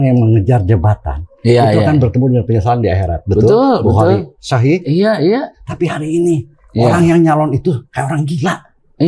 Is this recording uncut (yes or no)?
yes